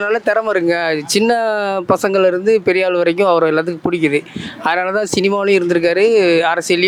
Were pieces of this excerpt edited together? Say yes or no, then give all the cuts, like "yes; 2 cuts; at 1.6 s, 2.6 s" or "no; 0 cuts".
no; 0 cuts